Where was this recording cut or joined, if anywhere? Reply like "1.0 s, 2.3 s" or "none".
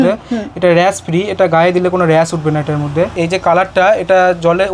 3.2 s